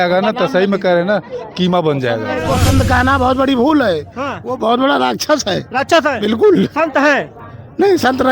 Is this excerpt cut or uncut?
cut